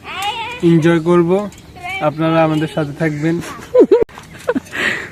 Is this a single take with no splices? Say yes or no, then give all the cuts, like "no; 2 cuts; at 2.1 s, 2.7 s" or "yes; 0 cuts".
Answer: no; 1 cut; at 4.0 s